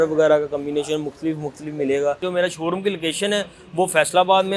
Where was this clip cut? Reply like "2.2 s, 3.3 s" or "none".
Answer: 2.2 s